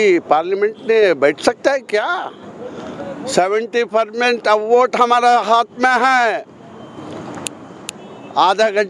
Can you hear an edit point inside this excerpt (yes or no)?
no